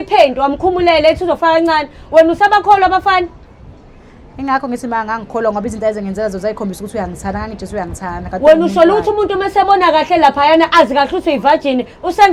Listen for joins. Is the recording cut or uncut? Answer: uncut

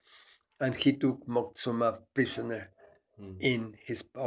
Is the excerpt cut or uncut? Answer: uncut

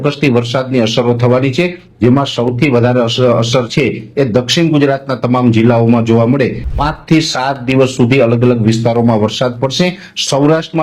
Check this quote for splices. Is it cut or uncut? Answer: cut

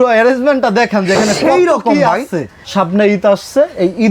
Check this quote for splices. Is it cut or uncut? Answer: cut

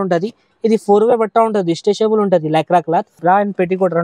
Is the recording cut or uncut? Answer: cut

